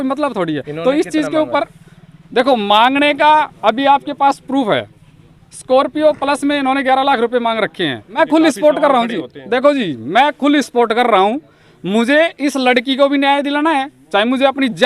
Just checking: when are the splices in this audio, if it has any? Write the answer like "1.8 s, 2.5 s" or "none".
8.1 s